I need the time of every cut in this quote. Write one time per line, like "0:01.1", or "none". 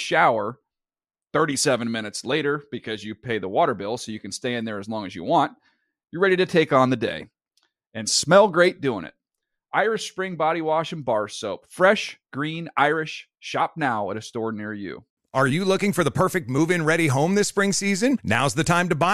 0:15.1